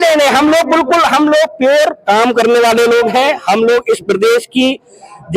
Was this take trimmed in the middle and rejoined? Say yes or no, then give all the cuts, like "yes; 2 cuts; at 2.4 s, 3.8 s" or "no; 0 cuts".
no; 0 cuts